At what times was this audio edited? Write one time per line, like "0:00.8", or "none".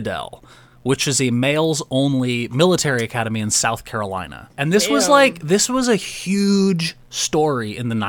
0:04.5